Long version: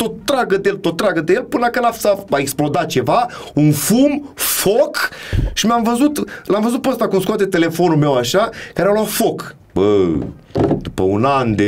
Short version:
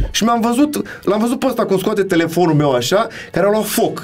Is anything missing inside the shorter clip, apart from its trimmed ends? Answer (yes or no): no